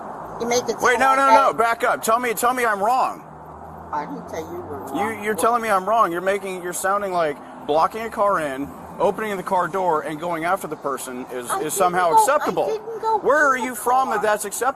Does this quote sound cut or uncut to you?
uncut